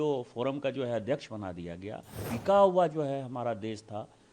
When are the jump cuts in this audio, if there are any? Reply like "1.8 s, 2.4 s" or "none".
2.2 s